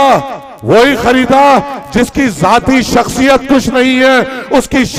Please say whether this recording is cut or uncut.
uncut